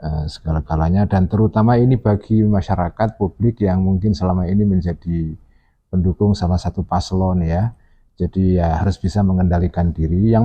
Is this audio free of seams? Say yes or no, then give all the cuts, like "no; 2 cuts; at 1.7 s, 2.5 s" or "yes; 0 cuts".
yes; 0 cuts